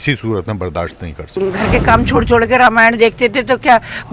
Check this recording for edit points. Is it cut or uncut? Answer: cut